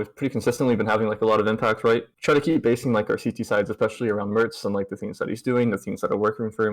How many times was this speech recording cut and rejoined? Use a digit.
1